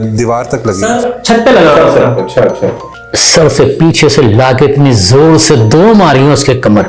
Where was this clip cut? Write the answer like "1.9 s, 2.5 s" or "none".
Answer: 2.8 s